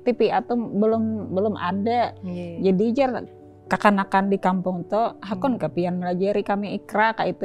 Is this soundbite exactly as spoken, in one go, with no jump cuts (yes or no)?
yes